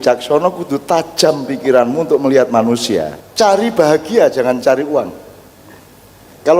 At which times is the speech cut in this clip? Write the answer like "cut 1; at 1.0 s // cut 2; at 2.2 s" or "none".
cut 1; at 3.2 s